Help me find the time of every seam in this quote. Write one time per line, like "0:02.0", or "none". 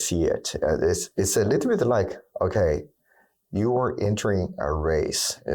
0:01.1